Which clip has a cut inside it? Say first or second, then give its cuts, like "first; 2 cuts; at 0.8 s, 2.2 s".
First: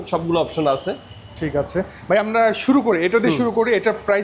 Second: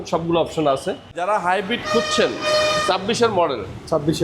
second; 1 cut; at 1.2 s